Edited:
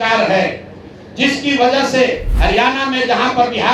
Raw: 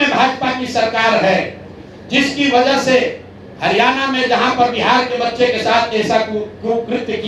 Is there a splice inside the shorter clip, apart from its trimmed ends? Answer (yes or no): yes